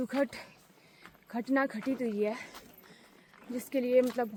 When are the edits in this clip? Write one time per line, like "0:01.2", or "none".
none